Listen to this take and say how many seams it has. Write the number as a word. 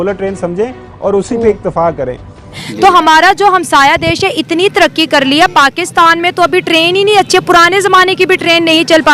one